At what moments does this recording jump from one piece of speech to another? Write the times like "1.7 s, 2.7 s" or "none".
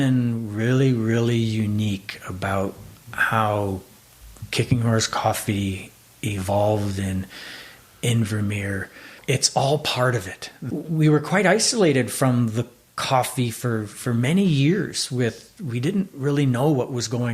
none